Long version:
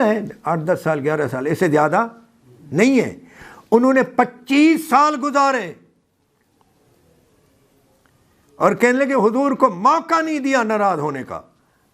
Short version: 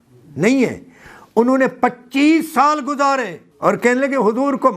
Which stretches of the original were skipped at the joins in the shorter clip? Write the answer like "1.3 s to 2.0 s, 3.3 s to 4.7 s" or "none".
5.8 s to 8.4 s